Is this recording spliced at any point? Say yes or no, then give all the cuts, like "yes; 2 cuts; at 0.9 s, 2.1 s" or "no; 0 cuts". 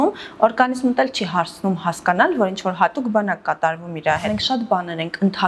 yes; 1 cut; at 4.3 s